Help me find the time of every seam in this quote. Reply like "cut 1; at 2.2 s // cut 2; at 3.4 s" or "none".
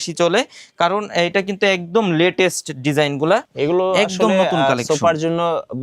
cut 1; at 3.5 s